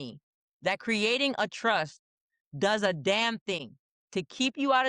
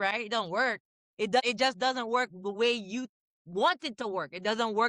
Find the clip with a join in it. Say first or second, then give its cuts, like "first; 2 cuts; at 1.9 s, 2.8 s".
second; 1 cut; at 1.4 s